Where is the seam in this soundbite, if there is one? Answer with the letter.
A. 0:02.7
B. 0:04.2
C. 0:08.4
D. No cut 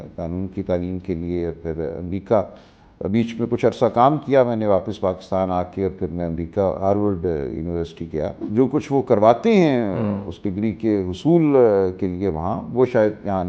C